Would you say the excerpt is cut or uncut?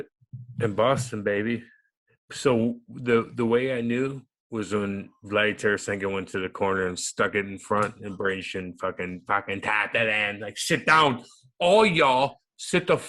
uncut